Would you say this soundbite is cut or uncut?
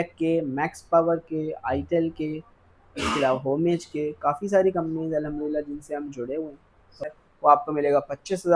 cut